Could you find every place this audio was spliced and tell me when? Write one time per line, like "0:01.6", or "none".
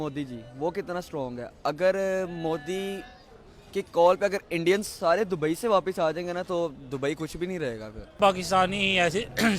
0:08.2